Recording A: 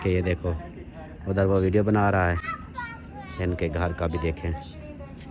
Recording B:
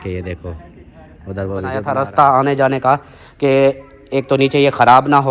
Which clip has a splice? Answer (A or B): B